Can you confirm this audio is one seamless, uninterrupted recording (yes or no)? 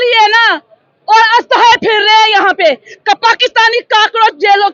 yes